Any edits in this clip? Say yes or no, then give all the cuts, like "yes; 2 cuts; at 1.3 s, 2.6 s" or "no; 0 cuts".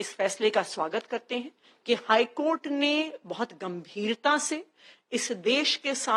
no; 0 cuts